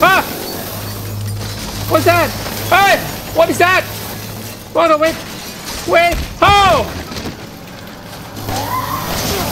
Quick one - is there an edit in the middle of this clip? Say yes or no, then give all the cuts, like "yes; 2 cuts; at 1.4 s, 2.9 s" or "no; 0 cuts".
no; 0 cuts